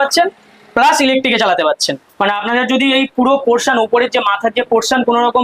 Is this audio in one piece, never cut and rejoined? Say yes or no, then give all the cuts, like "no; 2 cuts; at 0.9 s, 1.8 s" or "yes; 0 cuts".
no; 1 cut; at 1.8 s